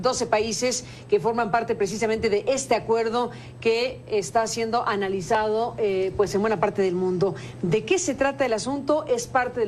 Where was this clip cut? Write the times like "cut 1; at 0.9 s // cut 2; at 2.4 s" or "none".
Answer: cut 1; at 3.1 s